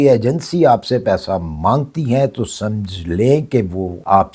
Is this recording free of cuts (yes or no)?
yes